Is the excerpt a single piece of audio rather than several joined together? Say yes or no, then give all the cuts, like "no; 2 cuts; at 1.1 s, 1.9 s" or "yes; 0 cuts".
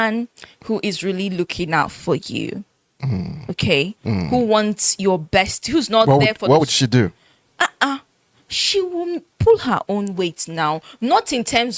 yes; 0 cuts